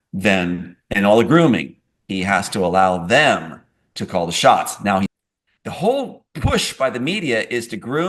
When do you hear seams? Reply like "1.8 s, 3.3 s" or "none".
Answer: 5.1 s

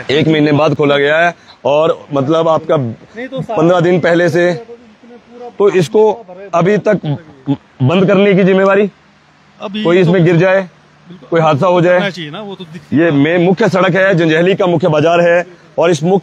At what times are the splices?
none

